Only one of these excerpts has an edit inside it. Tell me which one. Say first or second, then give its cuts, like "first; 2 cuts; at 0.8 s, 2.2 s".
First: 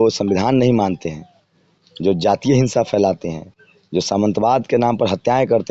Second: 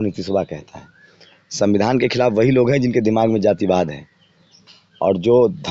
second; 1 cut; at 4.7 s